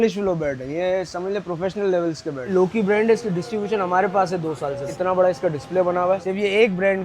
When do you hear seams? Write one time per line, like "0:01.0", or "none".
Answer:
0:02.5
0:05.0